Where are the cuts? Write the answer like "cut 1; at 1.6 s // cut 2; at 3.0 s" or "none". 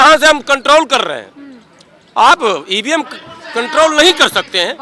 none